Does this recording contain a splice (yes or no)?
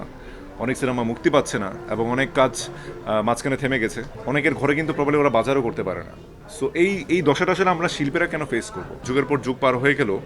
yes